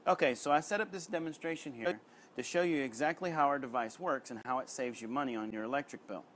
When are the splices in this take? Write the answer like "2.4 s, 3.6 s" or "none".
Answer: 1.8 s, 4.3 s, 5.5 s